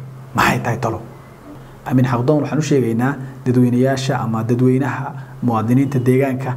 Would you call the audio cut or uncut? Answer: cut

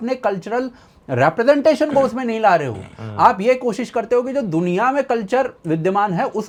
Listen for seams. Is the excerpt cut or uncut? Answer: uncut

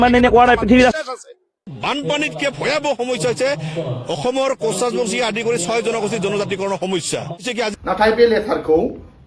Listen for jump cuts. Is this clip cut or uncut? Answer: cut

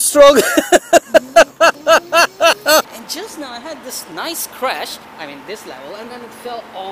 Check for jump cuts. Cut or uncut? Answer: cut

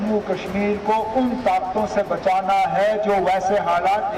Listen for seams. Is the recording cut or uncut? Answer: uncut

